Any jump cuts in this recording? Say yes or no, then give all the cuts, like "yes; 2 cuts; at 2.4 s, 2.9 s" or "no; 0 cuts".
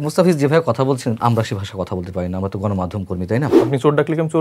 yes; 2 cuts; at 1.2 s, 3.6 s